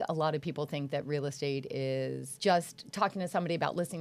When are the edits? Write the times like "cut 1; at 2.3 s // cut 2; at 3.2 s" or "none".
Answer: cut 1; at 2.3 s

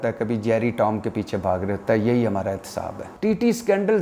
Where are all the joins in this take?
cut 1; at 3.1 s

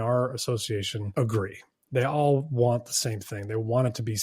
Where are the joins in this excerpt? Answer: cut 1; at 1.0 s

